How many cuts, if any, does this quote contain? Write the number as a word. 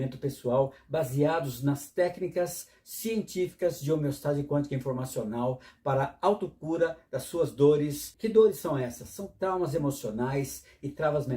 one